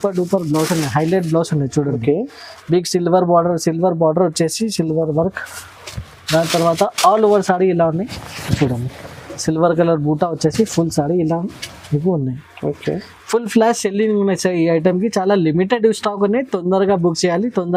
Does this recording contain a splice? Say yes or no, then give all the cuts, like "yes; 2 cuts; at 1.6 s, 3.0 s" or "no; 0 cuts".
no; 0 cuts